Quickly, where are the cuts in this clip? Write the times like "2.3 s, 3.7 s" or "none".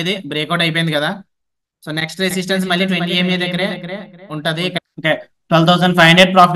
4.8 s